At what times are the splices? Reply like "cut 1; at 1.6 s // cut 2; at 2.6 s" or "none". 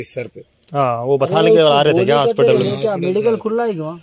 cut 1; at 1.8 s